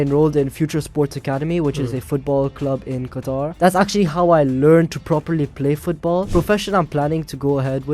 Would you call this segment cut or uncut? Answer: cut